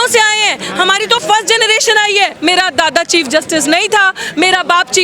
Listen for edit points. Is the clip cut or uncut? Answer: cut